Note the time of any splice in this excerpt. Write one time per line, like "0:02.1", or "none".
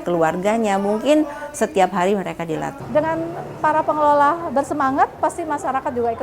0:02.7

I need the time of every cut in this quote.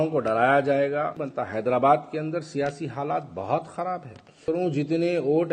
0:01.2
0:04.4

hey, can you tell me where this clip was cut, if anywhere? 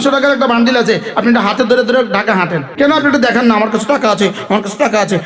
0:02.7

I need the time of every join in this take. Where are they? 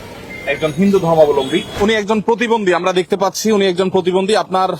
0:01.7

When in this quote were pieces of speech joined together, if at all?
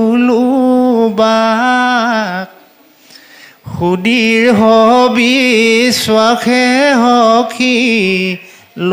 none

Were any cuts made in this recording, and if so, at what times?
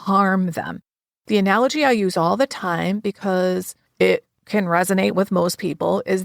0:03.8

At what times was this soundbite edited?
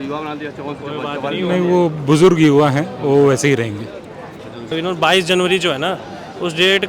0:04.7

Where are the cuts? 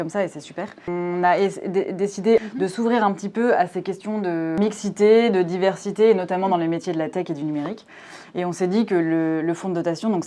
0:00.9
0:02.5
0:04.6

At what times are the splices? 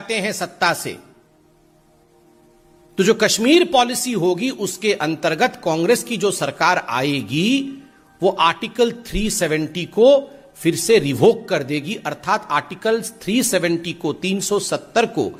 none

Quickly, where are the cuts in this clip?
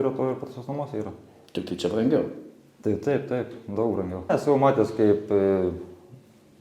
0:04.3

